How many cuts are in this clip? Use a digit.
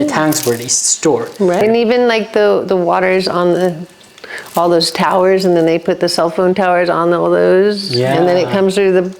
1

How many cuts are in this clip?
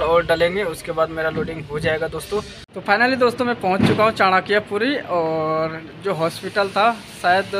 1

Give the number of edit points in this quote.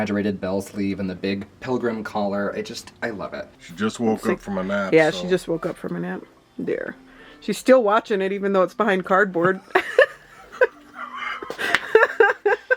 1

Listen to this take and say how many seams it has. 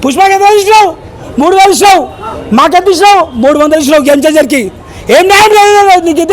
0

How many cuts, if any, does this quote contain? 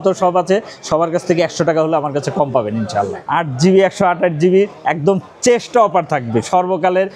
1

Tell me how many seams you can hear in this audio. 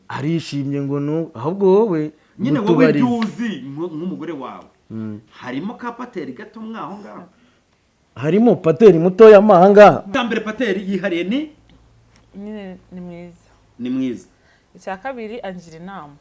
1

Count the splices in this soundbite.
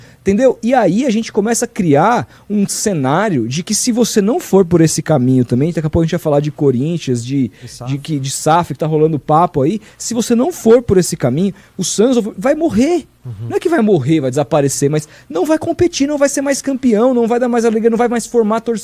0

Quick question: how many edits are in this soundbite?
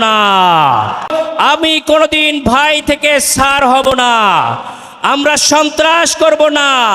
1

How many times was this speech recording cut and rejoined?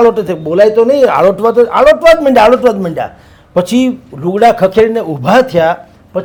0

